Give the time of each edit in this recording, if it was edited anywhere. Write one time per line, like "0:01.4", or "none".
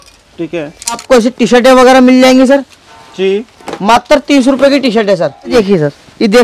0:01.0
0:05.5